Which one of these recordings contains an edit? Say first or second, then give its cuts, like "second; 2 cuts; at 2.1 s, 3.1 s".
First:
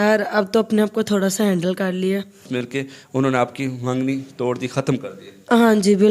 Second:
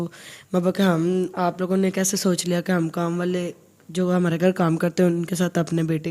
first; 1 cut; at 2.4 s